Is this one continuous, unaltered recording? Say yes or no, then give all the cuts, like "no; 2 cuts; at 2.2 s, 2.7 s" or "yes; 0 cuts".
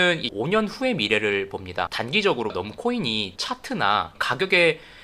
no; 1 cut; at 2.5 s